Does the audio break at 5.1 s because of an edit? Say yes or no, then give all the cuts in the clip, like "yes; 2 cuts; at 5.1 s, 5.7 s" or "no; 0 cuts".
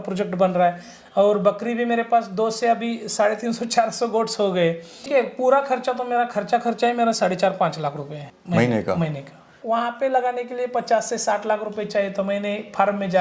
yes; 3 cuts; at 5.1 s, 8.2 s, 9.6 s